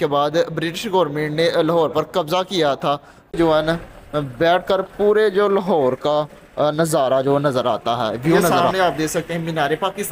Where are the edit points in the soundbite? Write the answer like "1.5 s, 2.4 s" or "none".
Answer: 3.3 s, 8.5 s